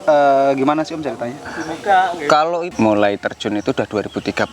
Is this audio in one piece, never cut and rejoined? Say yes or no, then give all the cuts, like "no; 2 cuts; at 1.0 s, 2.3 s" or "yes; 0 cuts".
no; 1 cut; at 2.7 s